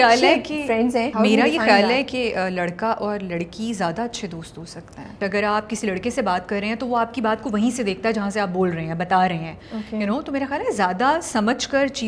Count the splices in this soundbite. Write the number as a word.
two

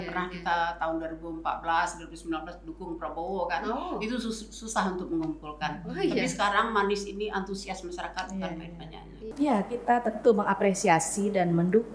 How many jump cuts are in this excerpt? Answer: one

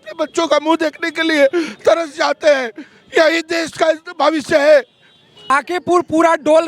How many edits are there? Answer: one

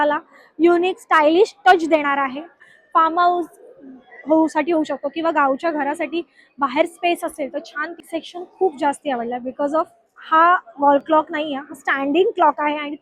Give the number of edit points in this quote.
two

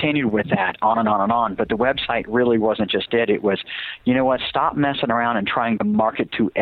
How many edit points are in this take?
zero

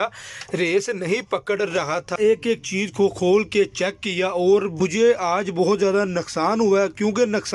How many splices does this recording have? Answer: two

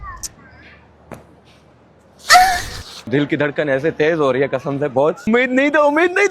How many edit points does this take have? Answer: two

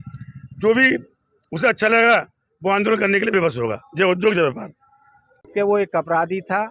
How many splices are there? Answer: one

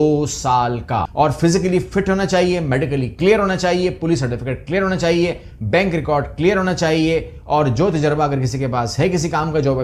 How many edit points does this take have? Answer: one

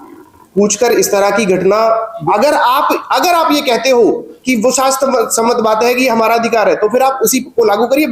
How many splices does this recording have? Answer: one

